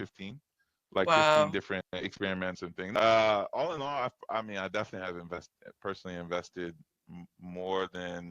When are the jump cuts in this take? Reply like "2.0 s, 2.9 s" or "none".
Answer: 2.8 s